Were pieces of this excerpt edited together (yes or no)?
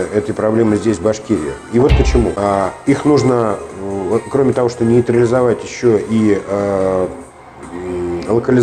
yes